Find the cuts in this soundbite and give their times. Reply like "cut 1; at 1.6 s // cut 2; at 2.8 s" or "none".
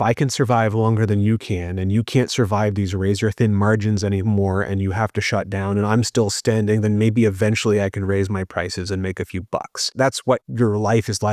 cut 1; at 10.3 s